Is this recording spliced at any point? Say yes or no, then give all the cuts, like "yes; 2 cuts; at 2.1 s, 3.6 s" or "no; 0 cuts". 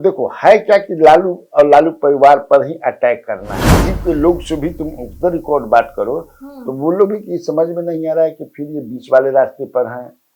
yes; 1 cut; at 3.7 s